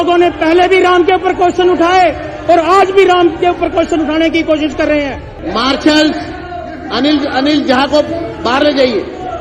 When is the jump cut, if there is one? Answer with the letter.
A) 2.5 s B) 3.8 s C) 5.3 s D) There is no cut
C